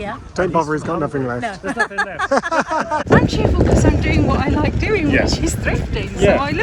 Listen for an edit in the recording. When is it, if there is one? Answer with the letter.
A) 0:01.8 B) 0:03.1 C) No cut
B